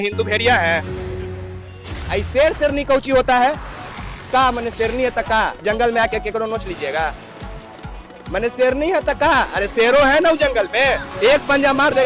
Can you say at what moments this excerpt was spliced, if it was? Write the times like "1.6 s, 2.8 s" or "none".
none